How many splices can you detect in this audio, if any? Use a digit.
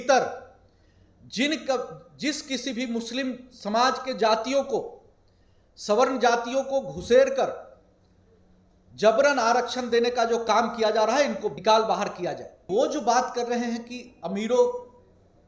2